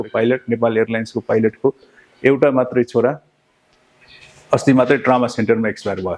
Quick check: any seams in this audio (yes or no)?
no